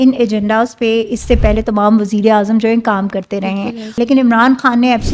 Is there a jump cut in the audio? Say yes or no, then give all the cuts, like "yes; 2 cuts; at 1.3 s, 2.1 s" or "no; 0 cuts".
yes; 1 cut; at 3.9 s